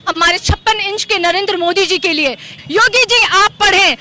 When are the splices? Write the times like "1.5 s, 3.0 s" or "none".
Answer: 2.6 s

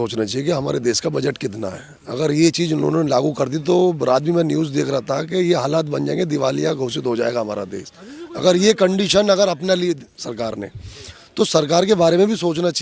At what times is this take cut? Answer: none

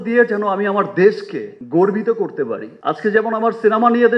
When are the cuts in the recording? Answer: 2.7 s

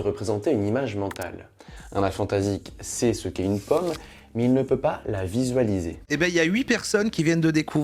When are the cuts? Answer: 6.0 s

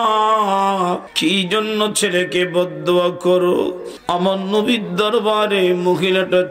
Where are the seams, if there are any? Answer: 1.1 s, 3.9 s

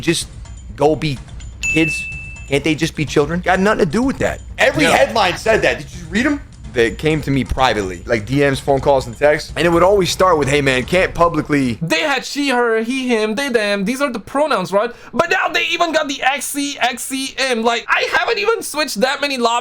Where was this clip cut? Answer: 6.6 s, 11.8 s, 17.9 s

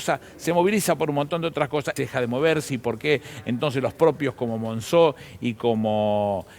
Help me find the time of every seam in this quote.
1.9 s

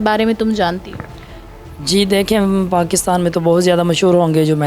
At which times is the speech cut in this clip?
none

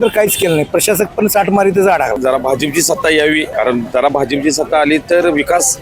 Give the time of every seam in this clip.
2.2 s, 3.5 s

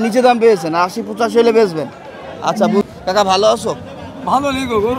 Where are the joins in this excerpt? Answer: 2.8 s

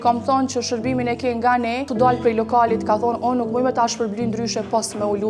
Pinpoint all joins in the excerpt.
1.9 s

